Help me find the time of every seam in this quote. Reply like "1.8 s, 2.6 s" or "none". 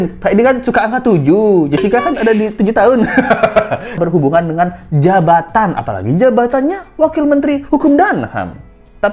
4.0 s